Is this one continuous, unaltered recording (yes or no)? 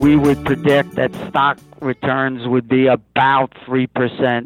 no